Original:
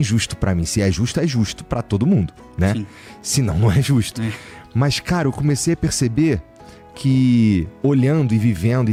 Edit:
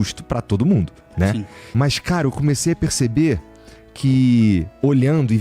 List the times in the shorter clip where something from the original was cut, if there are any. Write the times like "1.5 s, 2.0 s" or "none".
1.6 s